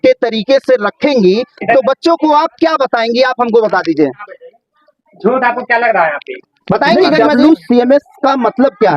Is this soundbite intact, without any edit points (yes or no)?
no